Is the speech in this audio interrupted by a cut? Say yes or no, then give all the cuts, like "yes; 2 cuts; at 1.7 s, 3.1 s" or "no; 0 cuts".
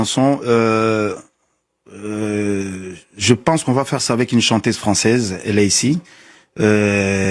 no; 0 cuts